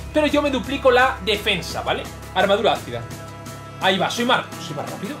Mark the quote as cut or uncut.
cut